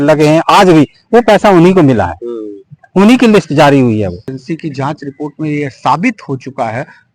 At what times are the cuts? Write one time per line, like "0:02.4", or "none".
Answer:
0:04.2